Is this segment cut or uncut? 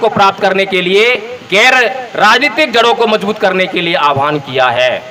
uncut